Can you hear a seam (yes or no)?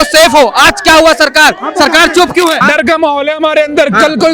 yes